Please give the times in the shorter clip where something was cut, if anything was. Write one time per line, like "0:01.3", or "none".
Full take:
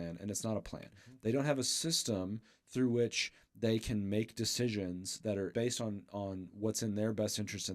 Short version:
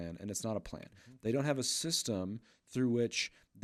none